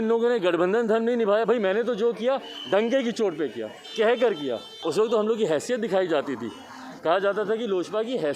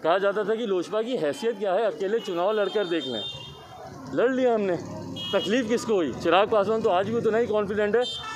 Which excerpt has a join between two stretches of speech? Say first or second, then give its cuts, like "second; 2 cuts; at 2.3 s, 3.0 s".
first; 1 cut; at 4.7 s